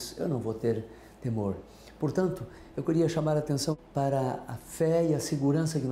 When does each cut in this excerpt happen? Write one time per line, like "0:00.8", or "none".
0:03.8